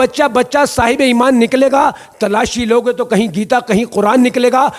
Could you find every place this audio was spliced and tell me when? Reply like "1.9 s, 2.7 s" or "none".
none